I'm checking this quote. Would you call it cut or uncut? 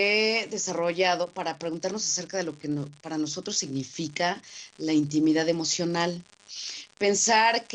cut